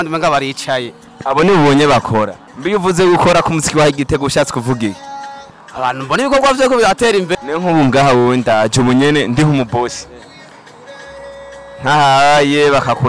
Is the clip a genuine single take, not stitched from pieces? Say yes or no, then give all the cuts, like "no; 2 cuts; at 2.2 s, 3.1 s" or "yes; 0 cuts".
no; 2 cuts; at 2.4 s, 7.3 s